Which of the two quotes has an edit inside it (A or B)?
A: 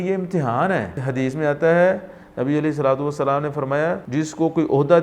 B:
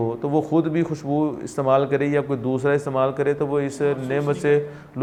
A